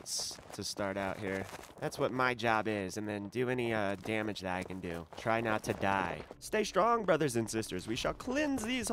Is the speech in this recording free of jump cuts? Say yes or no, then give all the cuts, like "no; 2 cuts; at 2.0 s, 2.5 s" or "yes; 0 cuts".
no; 2 cuts; at 1.7 s, 6.3 s